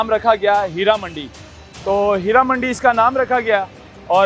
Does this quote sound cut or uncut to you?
uncut